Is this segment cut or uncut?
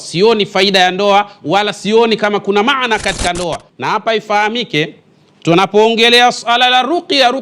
cut